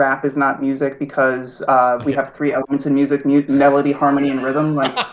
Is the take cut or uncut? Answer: uncut